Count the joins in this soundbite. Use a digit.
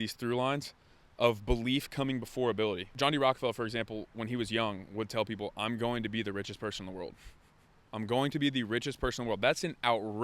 1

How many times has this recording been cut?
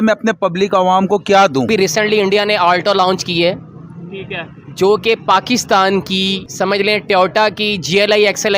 2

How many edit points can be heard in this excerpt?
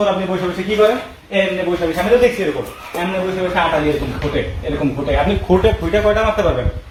0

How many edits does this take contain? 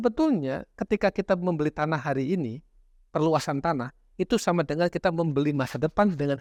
0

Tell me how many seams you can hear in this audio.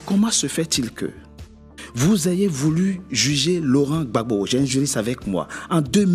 0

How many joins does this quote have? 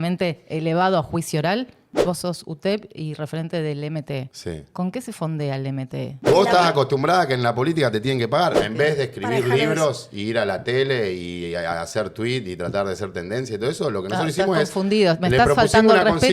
3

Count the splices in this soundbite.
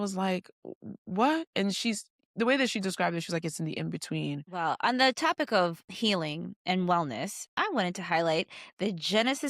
3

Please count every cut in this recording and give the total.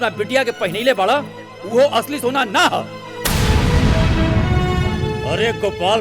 0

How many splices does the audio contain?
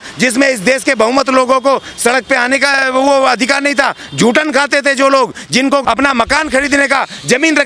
1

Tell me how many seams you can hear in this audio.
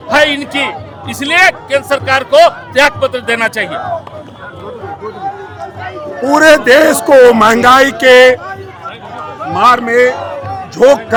0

